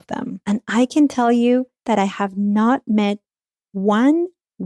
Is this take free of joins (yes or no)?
no